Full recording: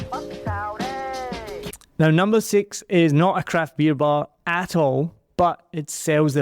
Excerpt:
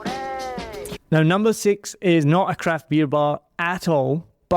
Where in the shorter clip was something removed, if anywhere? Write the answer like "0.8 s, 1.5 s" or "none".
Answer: 0.9 s